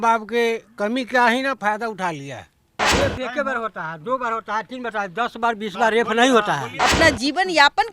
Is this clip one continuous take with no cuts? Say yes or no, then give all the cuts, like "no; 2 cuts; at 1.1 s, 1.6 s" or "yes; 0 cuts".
no; 2 cuts; at 2.8 s, 6.7 s